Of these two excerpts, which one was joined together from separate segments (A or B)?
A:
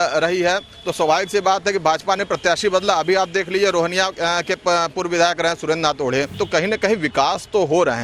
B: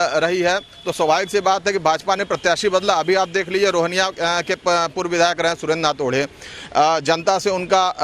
A